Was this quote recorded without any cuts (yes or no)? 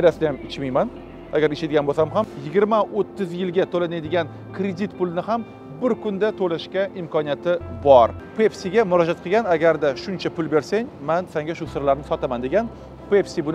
no